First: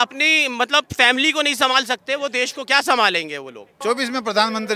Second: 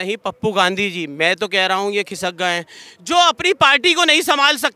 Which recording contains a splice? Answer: first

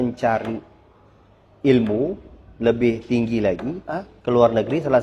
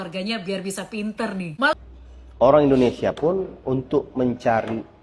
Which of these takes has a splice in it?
second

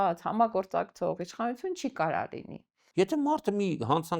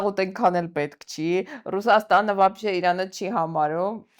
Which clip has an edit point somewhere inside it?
first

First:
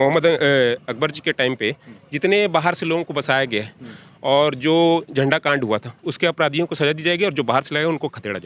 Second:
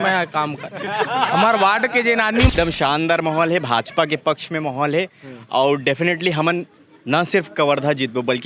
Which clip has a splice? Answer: second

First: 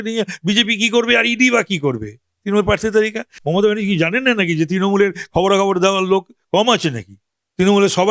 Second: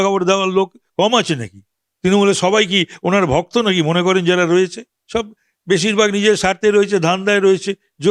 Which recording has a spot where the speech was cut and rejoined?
first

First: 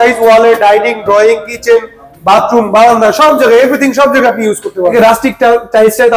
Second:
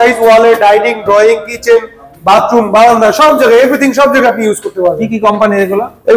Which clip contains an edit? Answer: first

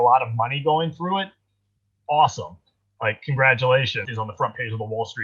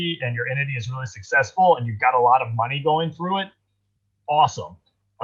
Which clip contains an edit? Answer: first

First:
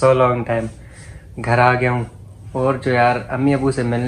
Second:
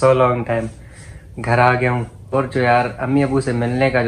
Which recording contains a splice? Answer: second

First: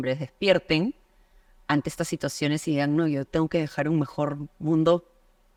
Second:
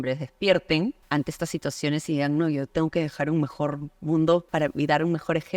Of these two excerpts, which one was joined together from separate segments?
second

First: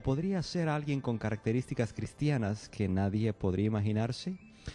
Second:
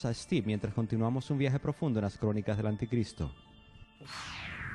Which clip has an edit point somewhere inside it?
first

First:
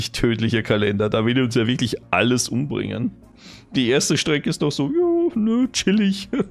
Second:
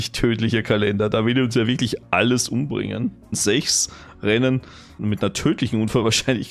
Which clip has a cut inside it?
second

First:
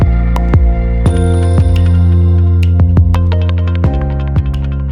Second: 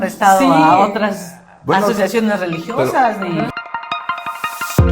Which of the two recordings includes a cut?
second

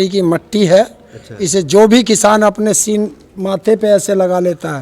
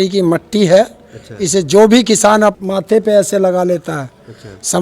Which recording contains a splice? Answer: second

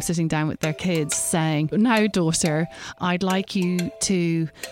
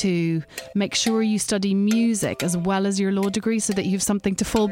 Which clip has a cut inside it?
first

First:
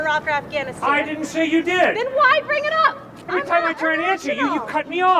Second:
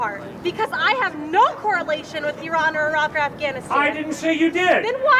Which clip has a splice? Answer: first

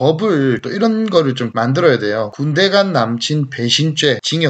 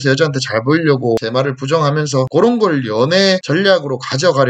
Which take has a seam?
second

